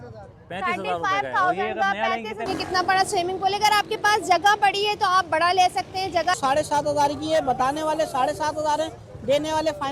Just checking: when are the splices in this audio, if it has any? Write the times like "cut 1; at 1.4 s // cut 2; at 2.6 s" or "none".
cut 1; at 2.5 s // cut 2; at 6.4 s